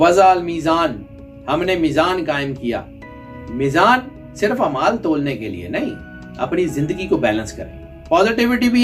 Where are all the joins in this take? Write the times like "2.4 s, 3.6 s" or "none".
none

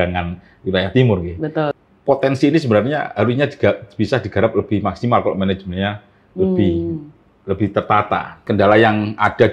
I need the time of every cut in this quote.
1.7 s, 8.4 s

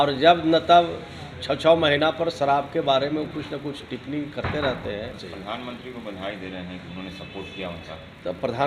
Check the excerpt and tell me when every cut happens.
5.3 s

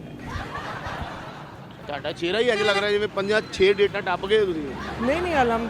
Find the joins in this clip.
1.7 s

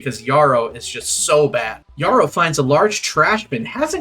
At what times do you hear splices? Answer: 1.8 s

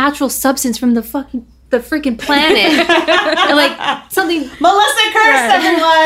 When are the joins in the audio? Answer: none

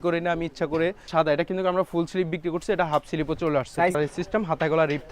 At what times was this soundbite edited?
1.1 s, 3.9 s

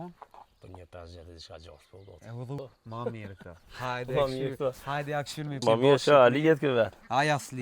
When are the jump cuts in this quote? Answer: 2.6 s, 5.6 s

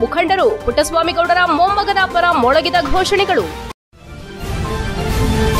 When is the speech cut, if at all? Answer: 3.6 s

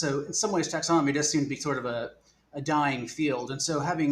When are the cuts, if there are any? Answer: none

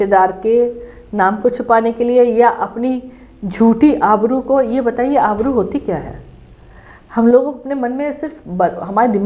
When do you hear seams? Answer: none

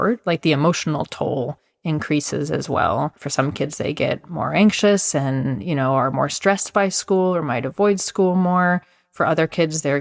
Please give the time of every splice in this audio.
3.2 s

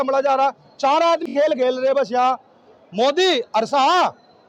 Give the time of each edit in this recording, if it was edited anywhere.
none

